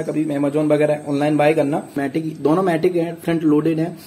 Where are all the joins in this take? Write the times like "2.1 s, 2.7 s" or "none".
2.0 s

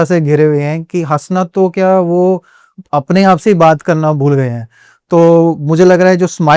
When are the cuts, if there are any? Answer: none

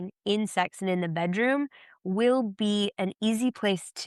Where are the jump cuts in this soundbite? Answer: none

